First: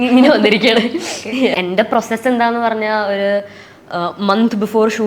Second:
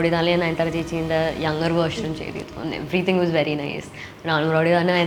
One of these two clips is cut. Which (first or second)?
first